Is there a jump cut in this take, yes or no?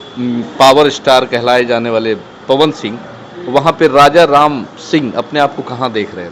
no